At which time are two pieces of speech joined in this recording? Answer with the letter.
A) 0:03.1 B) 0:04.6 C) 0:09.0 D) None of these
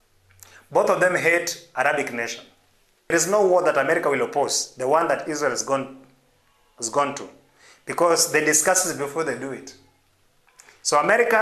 A